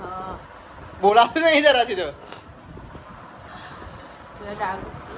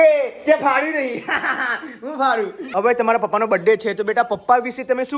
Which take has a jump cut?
second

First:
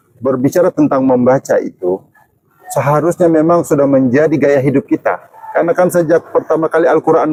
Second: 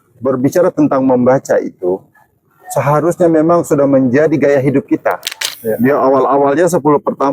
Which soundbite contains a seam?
second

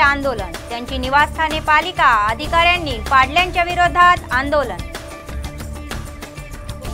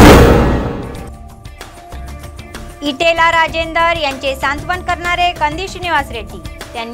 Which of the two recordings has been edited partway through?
second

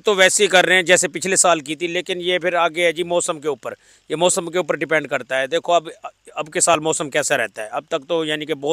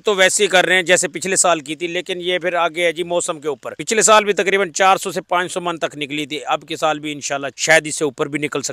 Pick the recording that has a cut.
second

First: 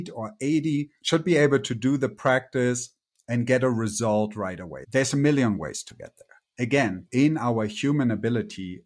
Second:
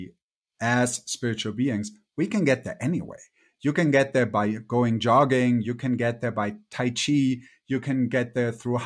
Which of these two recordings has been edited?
first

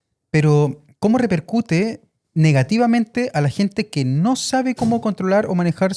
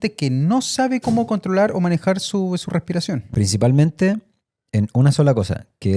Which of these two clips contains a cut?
second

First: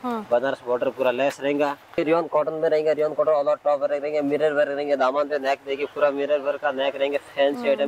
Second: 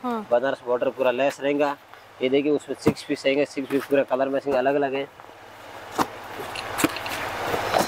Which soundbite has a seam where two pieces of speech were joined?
first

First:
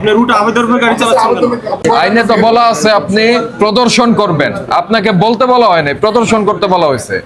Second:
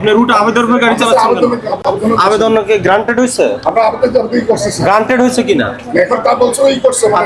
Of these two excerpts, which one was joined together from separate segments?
first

